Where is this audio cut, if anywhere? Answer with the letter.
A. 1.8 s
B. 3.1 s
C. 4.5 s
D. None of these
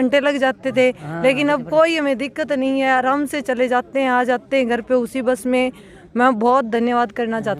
D